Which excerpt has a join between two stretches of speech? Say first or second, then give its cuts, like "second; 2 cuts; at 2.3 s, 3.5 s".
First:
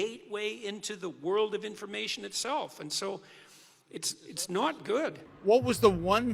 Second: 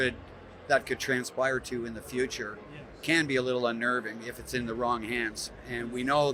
first; 1 cut; at 5.3 s